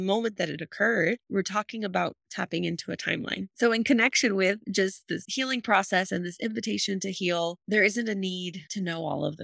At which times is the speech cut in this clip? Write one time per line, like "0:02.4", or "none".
0:03.5